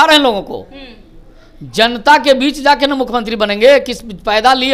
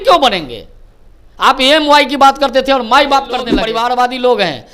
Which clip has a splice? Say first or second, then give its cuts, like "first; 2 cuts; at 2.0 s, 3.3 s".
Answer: second; 1 cut; at 3.6 s